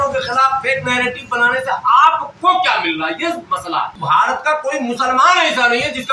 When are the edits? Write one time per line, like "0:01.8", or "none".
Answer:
0:04.0